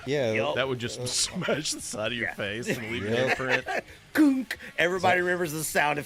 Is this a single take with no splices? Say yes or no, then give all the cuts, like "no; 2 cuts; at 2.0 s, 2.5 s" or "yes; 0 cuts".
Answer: yes; 0 cuts